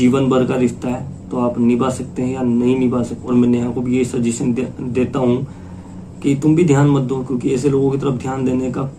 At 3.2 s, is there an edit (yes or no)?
yes